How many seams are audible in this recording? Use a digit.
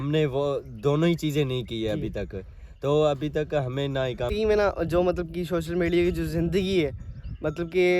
1